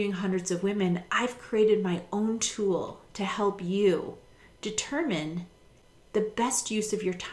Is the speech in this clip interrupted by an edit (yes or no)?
no